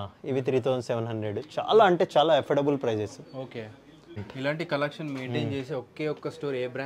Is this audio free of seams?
no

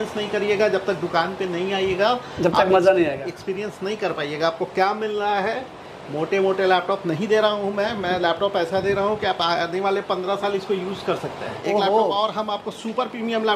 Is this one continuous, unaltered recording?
no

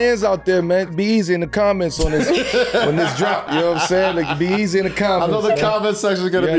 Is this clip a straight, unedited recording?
no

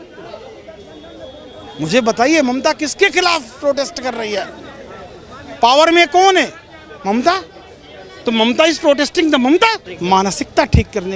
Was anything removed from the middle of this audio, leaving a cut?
yes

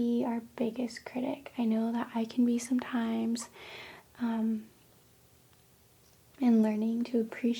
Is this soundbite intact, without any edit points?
yes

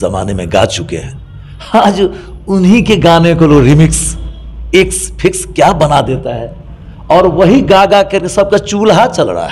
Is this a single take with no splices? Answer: yes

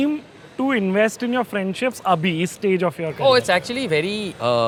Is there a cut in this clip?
no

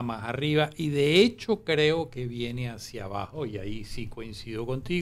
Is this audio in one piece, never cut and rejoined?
yes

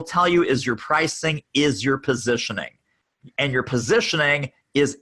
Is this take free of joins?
yes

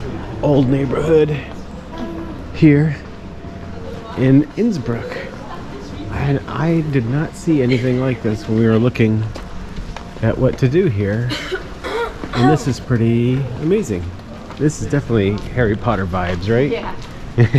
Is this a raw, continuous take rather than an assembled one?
yes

